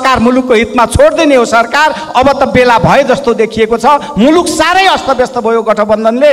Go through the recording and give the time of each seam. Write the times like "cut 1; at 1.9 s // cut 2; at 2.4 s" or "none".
none